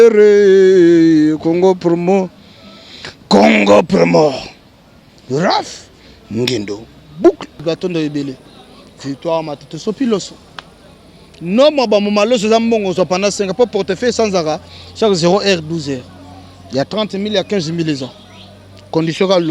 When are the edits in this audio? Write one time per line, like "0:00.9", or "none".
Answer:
0:07.6